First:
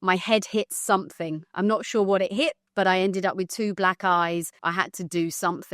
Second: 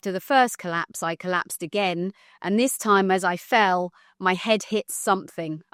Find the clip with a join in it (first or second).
first